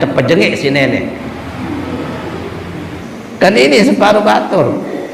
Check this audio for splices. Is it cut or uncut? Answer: cut